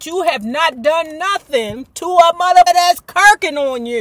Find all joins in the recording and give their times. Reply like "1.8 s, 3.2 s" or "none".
2.7 s